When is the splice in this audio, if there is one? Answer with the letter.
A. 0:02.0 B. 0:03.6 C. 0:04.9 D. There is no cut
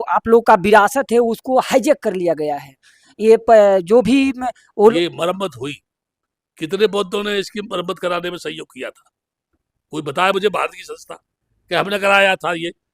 C